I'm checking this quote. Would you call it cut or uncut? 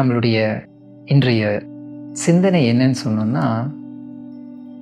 uncut